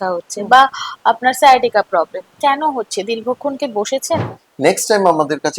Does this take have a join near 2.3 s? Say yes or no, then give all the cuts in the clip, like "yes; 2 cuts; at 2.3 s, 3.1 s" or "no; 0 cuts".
no; 1 cut; at 4.4 s